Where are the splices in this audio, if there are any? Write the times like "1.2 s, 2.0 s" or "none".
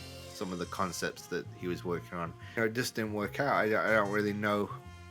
2.6 s